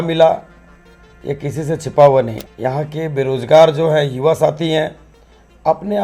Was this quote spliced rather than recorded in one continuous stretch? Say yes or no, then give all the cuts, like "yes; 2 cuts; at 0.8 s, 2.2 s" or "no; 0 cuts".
yes; 1 cut; at 2.4 s